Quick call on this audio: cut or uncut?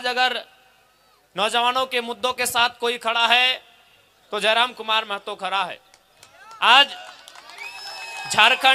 uncut